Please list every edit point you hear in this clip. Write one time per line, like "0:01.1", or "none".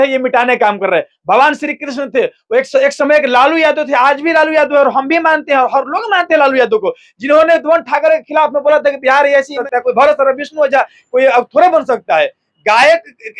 0:09.6